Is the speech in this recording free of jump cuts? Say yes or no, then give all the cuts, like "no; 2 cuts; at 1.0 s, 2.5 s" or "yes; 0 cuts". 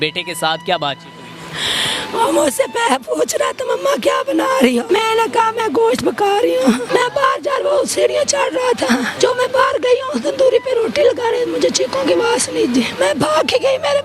no; 4 cuts; at 4.8 s, 6.8 s, 9.1 s, 12.9 s